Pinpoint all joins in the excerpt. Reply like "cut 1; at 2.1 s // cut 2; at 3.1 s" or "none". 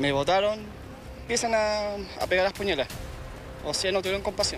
cut 1; at 1.2 s